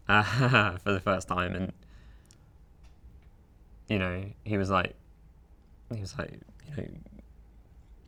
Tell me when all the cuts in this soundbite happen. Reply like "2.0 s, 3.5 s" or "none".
none